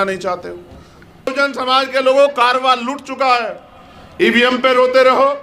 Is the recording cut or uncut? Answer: cut